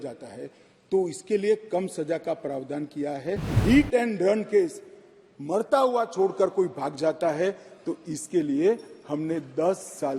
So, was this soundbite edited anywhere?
yes; 1 cut; at 3.6 s

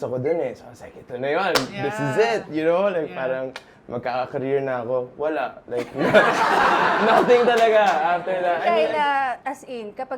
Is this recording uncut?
no; 2 cuts; at 8.6 s, 9.4 s

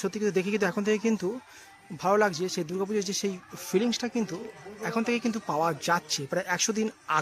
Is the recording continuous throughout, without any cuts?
yes; 0 cuts

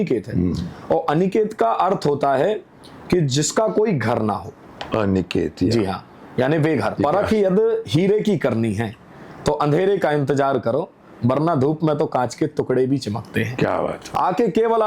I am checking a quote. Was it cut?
yes; 2 cuts; at 6.9 s, 14.0 s

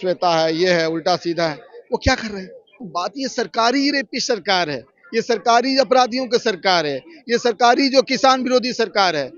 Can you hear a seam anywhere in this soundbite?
yes; 1 cut; at 2.9 s

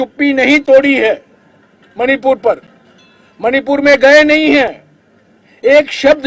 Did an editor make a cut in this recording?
no; 0 cuts

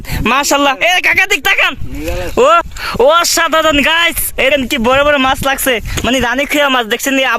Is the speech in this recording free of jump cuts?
no; 2 cuts; at 2.8 s, 4.5 s

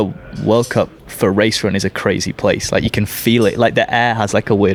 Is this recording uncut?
yes; 0 cuts

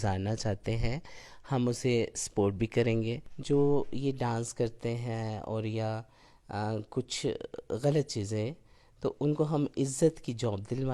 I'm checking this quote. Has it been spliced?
yes; 1 cut; at 3.3 s

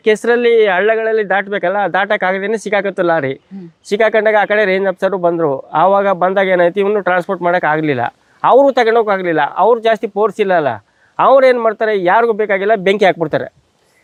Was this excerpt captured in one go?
yes; 0 cuts

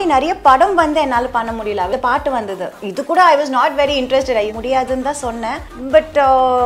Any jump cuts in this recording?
yes; 3 cuts; at 1.9 s, 4.5 s, 5.7 s

